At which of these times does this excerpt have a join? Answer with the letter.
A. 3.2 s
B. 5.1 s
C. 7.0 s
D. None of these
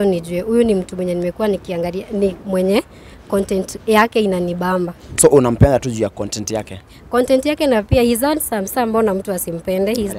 D